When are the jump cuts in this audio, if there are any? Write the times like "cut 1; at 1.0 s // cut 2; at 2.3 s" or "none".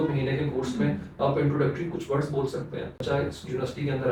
cut 1; at 3.0 s